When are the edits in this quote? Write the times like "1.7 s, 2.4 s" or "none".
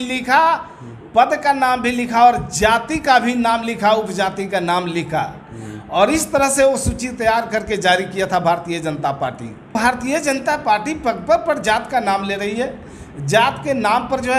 9.7 s